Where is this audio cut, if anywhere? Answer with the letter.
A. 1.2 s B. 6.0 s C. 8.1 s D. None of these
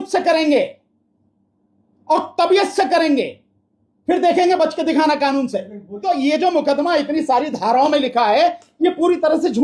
B